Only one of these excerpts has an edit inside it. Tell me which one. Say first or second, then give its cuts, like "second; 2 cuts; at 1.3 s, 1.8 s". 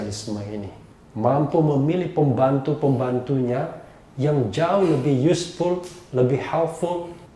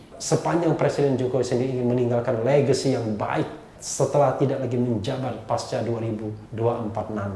second; 1 cut; at 6.4 s